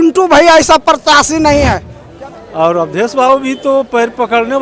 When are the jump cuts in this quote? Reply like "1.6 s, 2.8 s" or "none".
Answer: 2.0 s